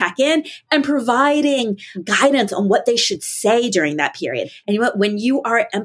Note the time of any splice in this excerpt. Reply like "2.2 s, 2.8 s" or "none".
1.9 s, 4.5 s

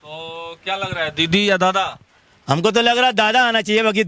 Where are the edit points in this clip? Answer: none

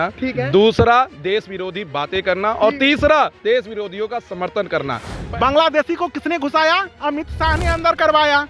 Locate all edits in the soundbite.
5.1 s

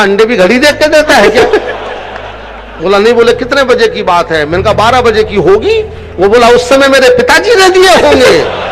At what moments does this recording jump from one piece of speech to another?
none

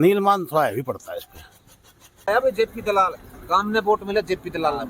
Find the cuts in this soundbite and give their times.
2.3 s

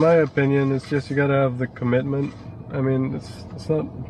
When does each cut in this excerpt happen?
none

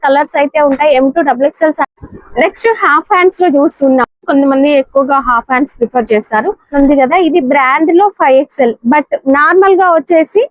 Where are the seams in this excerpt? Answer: 1.8 s, 6.7 s

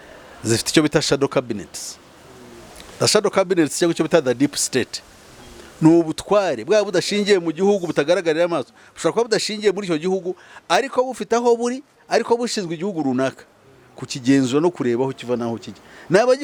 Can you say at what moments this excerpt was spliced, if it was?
none

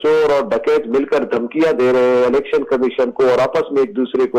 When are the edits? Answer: none

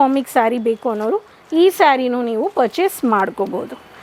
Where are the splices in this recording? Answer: none

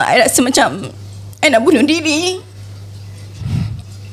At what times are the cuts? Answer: none

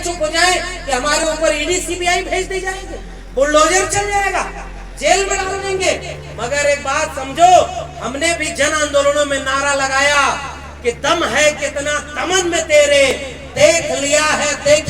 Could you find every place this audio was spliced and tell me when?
none

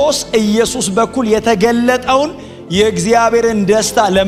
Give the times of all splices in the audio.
none

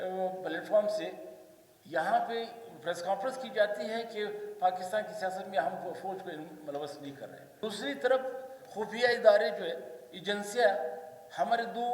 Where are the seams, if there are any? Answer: 7.5 s

